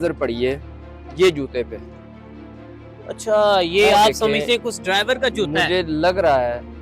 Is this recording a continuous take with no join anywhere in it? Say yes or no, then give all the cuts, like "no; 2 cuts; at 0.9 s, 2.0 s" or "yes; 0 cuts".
yes; 0 cuts